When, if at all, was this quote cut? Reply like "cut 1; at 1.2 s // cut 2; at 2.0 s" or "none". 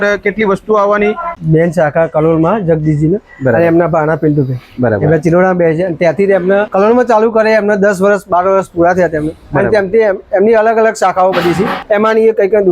cut 1; at 1.4 s // cut 2; at 6.7 s // cut 3; at 11.8 s